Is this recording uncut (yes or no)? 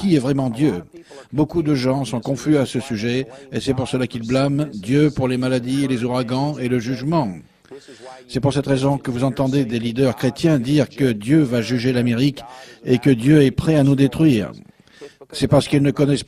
yes